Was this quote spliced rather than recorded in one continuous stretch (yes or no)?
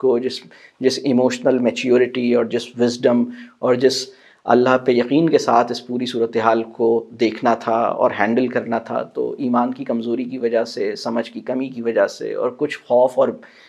no